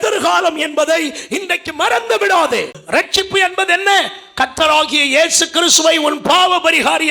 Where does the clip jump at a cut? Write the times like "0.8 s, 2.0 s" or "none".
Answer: 2.8 s